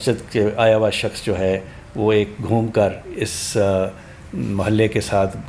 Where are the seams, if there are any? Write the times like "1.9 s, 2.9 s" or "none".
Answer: none